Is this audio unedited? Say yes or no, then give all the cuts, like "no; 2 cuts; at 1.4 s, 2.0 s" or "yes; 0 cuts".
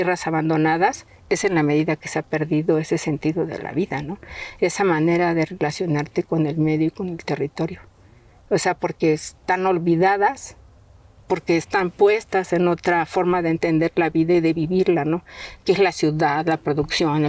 yes; 0 cuts